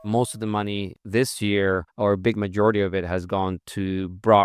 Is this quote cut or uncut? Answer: cut